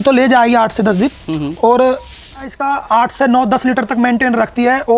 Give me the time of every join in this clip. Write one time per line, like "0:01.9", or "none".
0:02.6